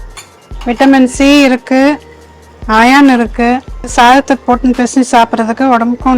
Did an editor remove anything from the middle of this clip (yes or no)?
yes